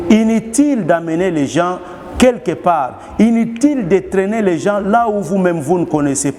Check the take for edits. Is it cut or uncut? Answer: uncut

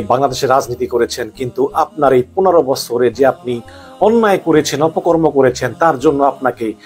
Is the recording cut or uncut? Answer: uncut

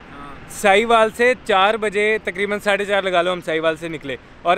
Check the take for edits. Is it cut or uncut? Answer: uncut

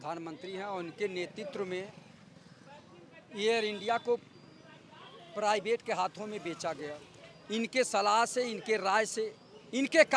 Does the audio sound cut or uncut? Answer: uncut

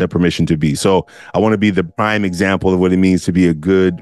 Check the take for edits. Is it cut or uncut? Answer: cut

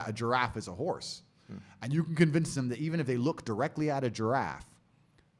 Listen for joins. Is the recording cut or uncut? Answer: uncut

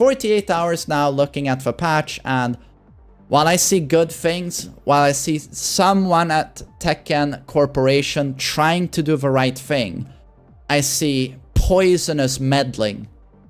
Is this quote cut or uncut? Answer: uncut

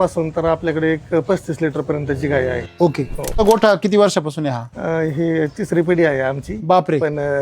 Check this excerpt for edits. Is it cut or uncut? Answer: cut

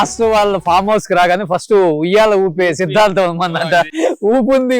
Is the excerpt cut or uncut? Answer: cut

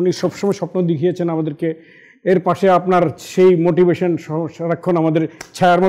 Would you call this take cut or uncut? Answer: uncut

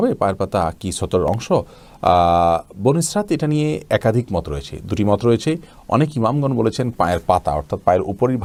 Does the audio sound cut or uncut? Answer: uncut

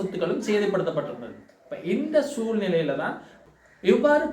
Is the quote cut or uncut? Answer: cut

